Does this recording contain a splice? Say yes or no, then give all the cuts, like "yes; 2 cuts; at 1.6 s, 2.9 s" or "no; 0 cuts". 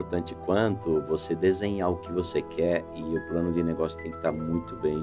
no; 0 cuts